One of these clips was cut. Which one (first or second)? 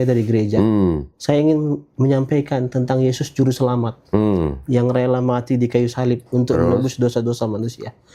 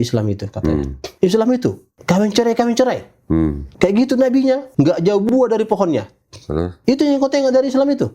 second